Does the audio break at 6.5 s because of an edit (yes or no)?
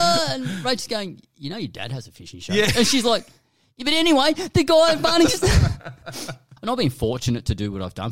yes